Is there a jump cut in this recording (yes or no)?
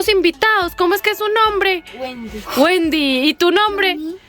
no